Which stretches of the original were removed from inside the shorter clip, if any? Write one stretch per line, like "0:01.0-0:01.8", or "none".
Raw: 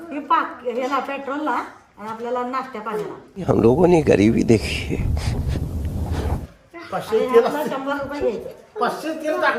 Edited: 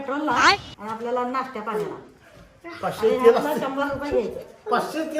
0:03.4-0:06.3

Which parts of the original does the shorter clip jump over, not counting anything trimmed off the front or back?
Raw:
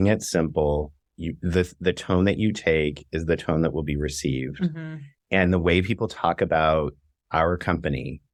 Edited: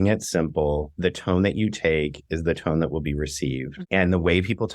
0:00.9-0:01.7
0:04.5-0:05.1

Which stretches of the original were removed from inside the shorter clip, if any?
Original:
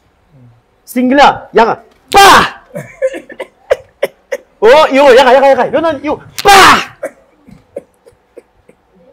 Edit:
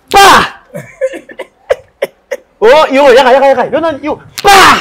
none

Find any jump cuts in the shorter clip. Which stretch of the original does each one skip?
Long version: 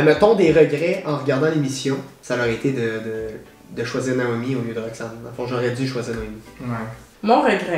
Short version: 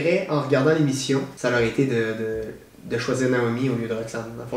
0:02.1-0:02.2

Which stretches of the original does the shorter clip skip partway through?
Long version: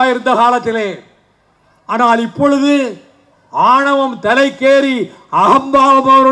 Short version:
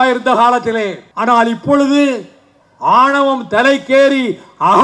0:01.0-0:01.8

